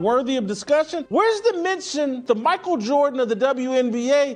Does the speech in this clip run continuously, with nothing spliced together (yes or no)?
yes